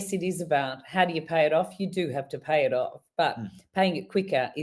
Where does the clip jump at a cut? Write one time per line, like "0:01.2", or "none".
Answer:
none